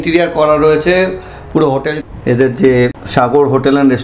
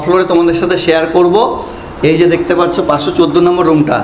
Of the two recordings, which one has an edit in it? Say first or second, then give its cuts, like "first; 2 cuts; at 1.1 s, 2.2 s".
first; 2 cuts; at 1.9 s, 3.0 s